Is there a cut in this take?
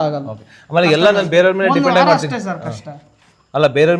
no; 0 cuts

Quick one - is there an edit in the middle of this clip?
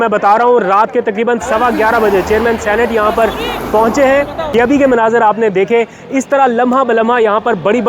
no; 0 cuts

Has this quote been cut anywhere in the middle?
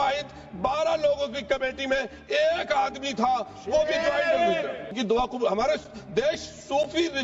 yes; 1 cut; at 5.0 s

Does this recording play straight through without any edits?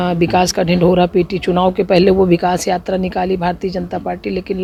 yes; 0 cuts

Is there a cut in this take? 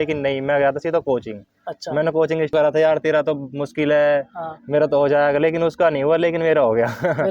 yes; 1 cut; at 2.5 s

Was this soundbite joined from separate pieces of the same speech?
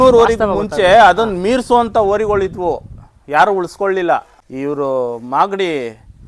yes; 1 cut; at 4.4 s

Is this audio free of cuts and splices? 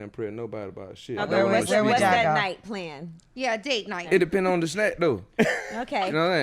no; 2 cuts; at 1.2 s, 4.0 s

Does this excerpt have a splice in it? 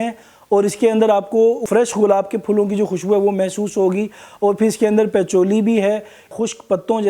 yes; 2 cuts; at 1.6 s, 6.3 s

